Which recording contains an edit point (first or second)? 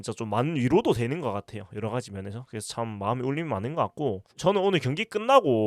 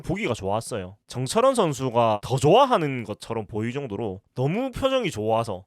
second